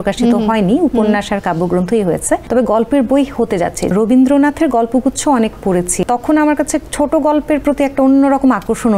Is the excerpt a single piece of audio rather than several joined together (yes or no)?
no